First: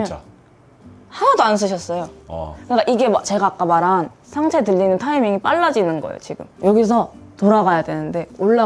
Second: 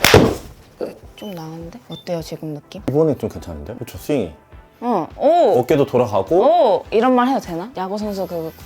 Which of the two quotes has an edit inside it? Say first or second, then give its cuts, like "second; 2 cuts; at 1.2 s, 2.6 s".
second; 2 cuts; at 2.7 s, 6.9 s